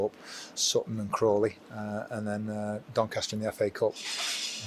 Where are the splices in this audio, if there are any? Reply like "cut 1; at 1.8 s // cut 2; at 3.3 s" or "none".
none